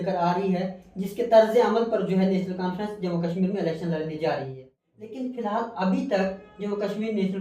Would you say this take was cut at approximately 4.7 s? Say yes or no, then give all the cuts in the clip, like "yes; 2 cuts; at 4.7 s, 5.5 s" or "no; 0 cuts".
yes; 1 cut; at 4.7 s